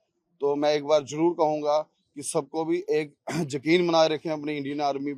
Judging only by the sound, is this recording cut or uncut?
uncut